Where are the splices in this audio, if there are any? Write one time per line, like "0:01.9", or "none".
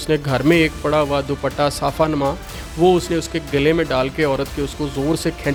none